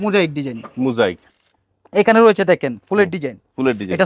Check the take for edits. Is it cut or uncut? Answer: cut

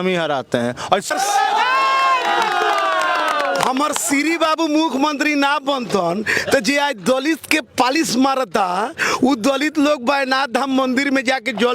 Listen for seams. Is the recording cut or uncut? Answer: cut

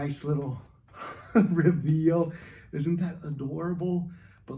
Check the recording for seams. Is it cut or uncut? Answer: uncut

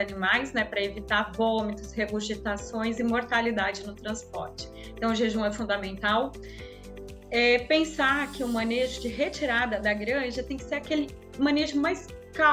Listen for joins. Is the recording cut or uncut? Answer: uncut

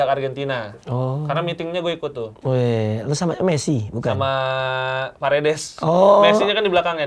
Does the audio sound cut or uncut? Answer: uncut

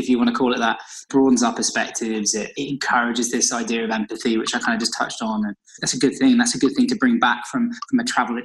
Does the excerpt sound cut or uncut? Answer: uncut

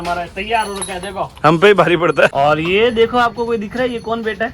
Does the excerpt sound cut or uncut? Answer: cut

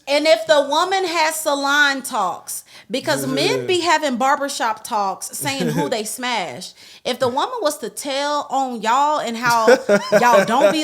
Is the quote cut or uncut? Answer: uncut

